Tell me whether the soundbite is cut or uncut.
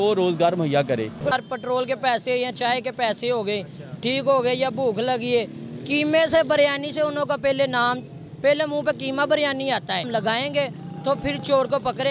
cut